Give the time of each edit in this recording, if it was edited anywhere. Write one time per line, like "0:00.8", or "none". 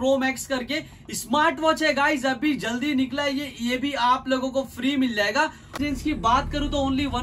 0:05.8

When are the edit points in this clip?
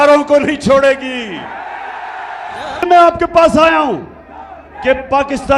0:02.8

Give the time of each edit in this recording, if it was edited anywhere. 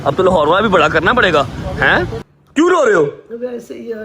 0:02.3

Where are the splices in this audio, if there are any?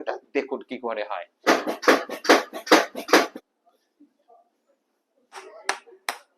0:01.5
0:03.4
0:05.3

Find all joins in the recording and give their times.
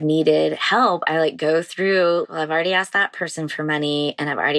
0:02.3

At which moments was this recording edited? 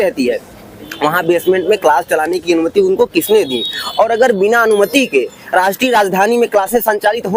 none

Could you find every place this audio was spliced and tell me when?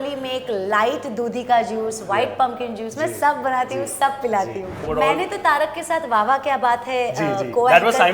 0:04.8

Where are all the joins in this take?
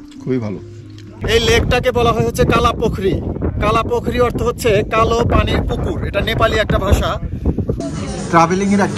0:01.1
0:07.8

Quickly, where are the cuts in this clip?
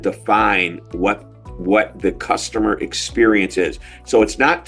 none

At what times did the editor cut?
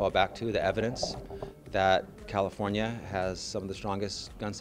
none

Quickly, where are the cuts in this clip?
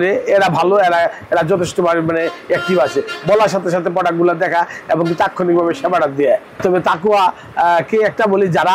0:06.6

